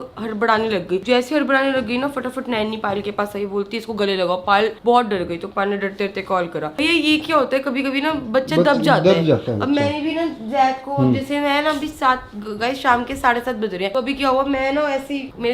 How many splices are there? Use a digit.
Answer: 0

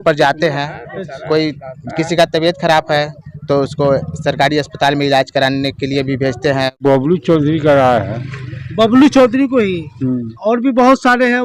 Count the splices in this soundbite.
1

